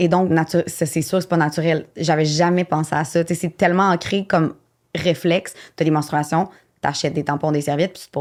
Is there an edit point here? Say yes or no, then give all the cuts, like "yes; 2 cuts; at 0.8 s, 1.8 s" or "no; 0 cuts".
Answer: no; 0 cuts